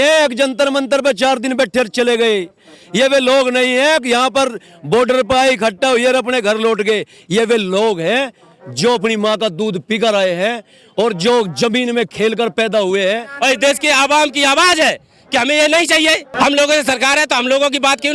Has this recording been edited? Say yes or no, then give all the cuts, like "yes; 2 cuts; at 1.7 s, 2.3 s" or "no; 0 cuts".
yes; 2 cuts; at 13.3 s, 16.3 s